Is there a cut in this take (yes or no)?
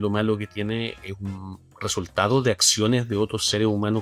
no